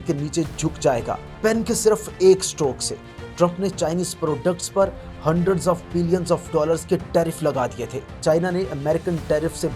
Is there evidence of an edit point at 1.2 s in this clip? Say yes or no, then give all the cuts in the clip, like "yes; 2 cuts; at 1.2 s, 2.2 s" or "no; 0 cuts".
yes; 2 cuts; at 1.2 s, 8.2 s